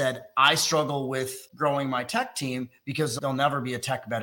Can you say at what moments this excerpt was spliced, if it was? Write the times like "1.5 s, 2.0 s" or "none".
1.4 s, 3.1 s